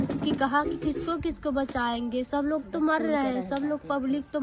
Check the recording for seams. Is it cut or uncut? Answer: uncut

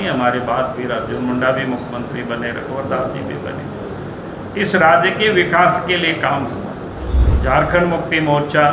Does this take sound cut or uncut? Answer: cut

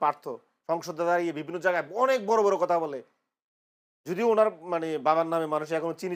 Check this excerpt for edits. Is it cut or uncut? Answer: uncut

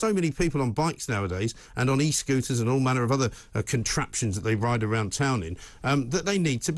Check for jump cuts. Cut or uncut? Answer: uncut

